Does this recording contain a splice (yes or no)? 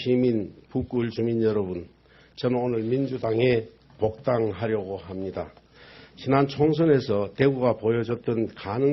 yes